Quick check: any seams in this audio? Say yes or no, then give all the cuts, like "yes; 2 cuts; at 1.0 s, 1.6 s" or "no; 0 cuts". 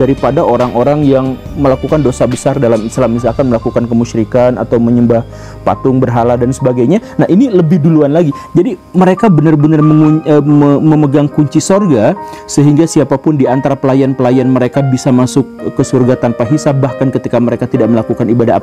no; 0 cuts